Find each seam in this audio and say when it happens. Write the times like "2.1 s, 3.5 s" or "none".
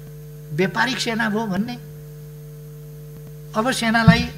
none